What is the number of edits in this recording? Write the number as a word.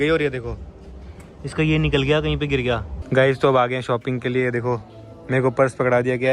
one